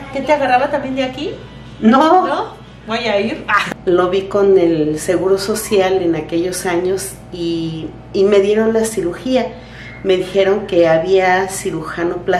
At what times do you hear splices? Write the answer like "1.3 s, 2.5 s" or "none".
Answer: 3.5 s